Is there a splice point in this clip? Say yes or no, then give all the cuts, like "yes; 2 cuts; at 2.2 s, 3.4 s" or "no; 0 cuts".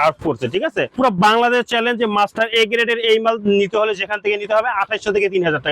yes; 1 cut; at 1.0 s